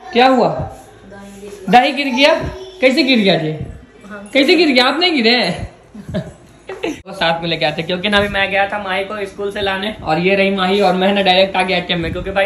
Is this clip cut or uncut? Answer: cut